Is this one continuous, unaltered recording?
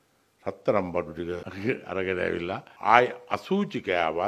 no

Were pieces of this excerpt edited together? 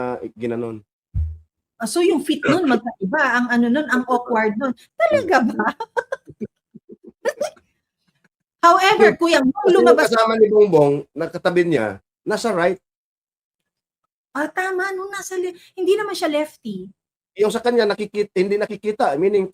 yes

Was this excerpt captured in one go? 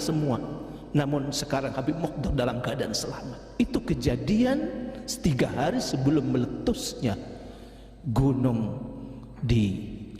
no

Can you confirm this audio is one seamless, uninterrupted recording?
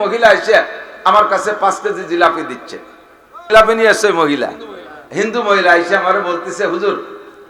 no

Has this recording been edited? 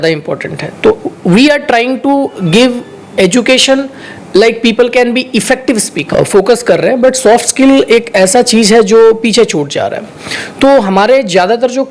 yes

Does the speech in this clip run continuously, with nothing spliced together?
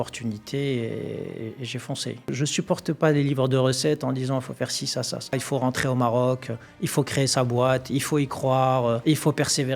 no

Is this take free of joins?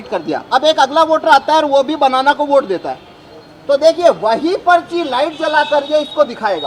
yes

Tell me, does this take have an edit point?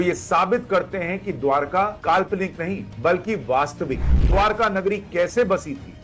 no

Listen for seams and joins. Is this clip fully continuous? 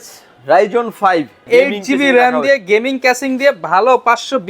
no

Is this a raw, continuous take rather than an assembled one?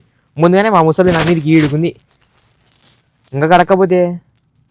yes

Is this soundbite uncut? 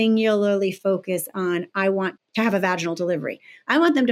no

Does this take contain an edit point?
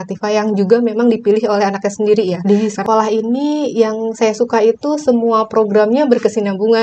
yes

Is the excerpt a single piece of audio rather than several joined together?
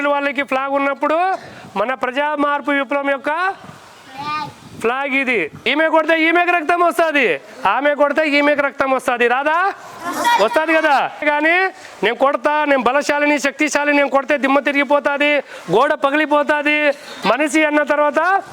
no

